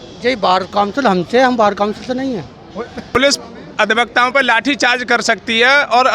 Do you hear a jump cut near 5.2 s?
no; 1 cut; at 3.1 s

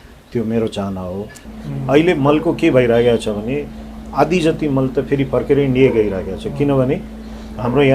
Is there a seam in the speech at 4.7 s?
no; 1 cut; at 1.5 s

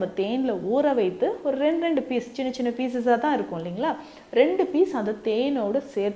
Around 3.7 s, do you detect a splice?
no; 0 cuts

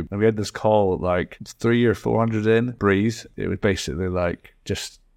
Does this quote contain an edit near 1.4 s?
yes; 2 cuts; at 1.4 s, 3.2 s

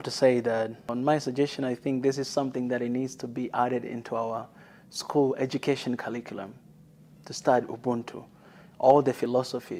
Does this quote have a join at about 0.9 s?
yes; 1 cut; at 0.9 s

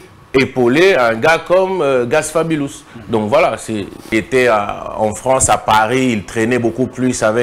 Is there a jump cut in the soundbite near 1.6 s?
no; 1 cut; at 4.1 s

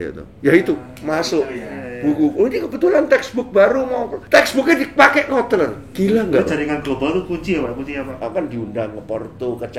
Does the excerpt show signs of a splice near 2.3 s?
no; 2 cuts; at 4.1 s, 8.0 s

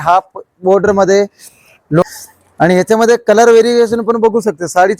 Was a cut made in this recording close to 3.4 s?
no; 1 cut; at 2.0 s

